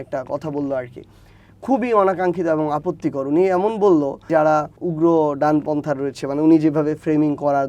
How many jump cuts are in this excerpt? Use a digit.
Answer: 0